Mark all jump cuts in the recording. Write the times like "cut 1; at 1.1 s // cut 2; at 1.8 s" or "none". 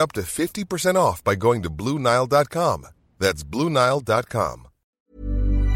cut 1; at 4.8 s